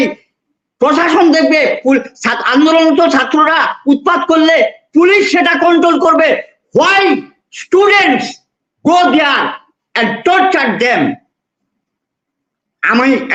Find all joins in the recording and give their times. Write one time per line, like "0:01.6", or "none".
none